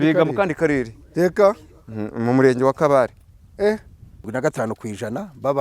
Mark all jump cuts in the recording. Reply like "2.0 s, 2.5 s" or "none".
4.1 s